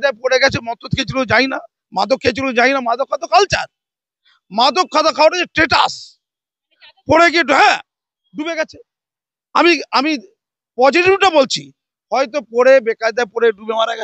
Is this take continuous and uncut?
yes; 0 cuts

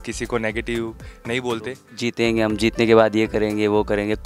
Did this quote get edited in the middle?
yes; 1 cut; at 1.9 s

